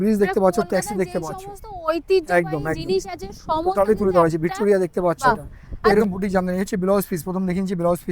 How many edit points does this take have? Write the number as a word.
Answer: one